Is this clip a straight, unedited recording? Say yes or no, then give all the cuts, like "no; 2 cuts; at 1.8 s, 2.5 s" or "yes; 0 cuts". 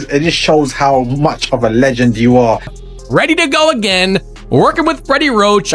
no; 1 cut; at 2.8 s